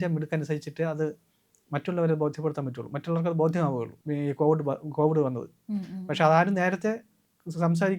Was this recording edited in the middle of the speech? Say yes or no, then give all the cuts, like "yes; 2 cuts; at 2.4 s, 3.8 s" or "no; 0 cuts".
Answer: yes; 1 cut; at 3.9 s